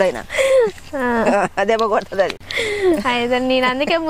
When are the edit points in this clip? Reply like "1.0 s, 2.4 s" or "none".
none